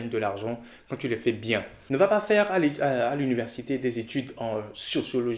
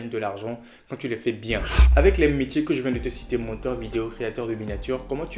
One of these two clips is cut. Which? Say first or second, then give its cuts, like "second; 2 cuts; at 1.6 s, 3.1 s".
first; 1 cut; at 1.7 s